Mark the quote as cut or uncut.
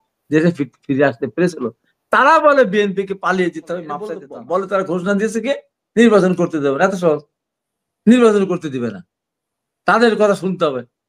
cut